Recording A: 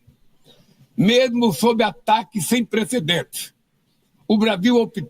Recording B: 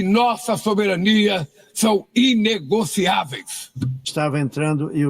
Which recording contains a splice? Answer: B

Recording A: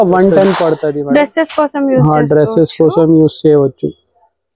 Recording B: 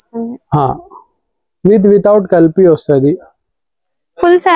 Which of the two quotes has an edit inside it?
A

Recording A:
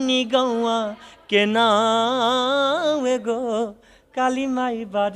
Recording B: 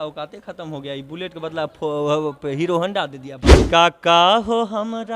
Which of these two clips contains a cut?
B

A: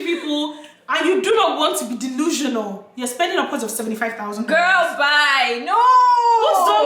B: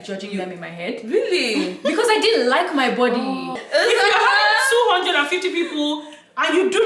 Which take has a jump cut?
B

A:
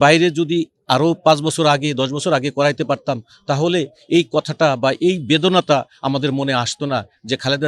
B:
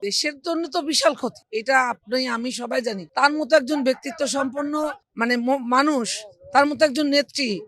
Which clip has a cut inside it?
B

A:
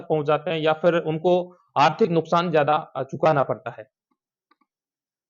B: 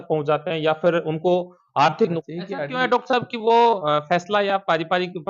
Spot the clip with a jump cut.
B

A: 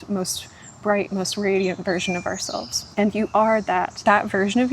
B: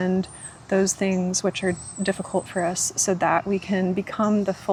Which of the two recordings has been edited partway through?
A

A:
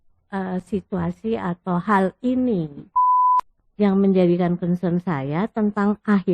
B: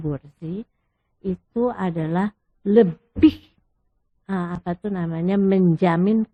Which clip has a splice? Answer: A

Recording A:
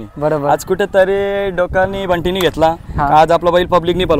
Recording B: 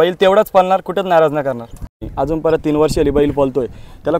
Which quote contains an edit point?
B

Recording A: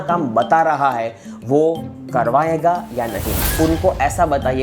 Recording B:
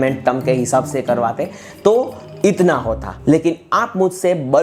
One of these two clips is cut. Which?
A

